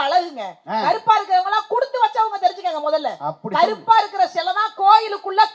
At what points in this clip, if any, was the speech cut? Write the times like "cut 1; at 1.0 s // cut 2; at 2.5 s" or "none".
none